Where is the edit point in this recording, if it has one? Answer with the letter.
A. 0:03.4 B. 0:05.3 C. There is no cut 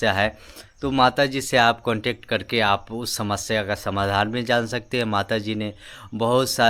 C